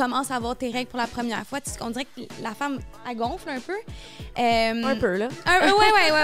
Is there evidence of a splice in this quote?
no; 0 cuts

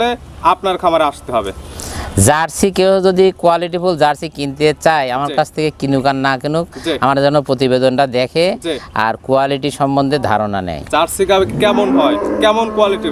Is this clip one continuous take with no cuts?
yes; 0 cuts

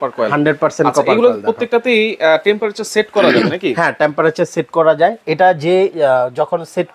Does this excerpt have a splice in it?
no; 0 cuts

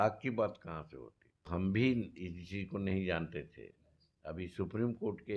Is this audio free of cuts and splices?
no; 1 cut; at 1.5 s

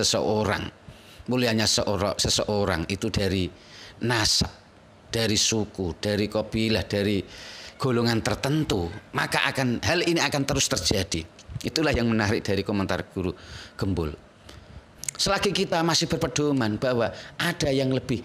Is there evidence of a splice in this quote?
yes; 1 cut; at 14.9 s

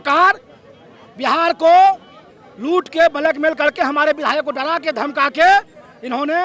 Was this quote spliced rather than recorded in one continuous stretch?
no; 0 cuts

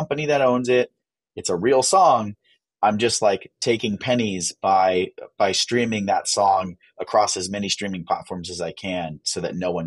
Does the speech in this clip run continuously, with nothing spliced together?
yes; 0 cuts

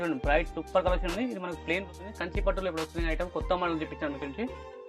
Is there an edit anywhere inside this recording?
yes; 1 cut; at 1.8 s

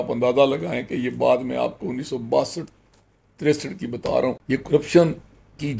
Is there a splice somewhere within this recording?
yes; 1 cut; at 4.4 s

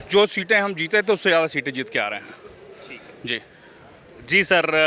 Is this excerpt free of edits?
yes; 0 cuts

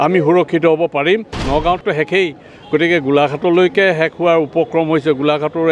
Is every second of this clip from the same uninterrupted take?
no; 1 cut; at 1.4 s

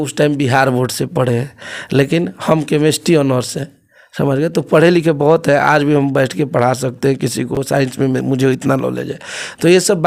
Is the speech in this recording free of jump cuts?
yes; 0 cuts

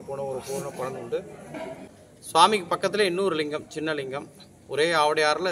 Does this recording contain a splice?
yes; 1 cut; at 1.9 s

